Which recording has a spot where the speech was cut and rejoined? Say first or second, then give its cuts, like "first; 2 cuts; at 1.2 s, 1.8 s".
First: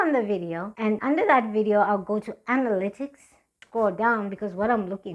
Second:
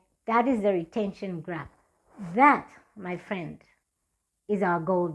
first; 2 cuts; at 1.0 s, 3.6 s